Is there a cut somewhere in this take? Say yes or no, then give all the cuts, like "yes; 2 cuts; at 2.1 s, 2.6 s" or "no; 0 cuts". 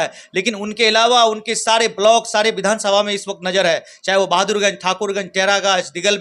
no; 0 cuts